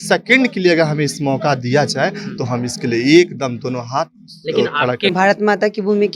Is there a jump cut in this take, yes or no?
yes